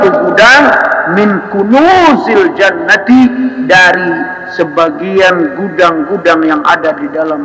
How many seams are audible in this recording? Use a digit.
0